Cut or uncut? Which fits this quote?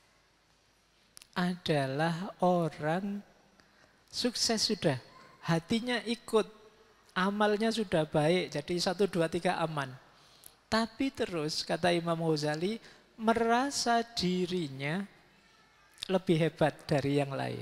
uncut